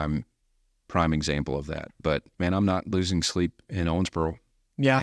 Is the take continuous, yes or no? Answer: no